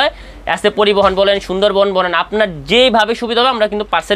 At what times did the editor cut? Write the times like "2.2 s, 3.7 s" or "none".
none